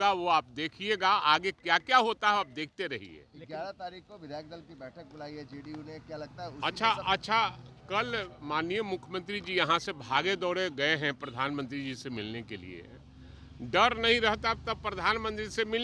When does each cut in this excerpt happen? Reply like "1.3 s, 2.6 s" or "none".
none